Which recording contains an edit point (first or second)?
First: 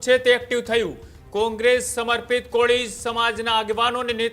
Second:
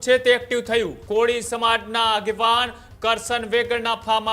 second